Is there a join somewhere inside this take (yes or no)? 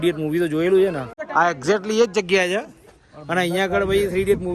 yes